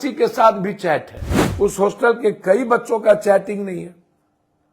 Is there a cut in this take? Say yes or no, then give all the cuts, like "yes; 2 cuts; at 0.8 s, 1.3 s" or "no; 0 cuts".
yes; 1 cut; at 1.4 s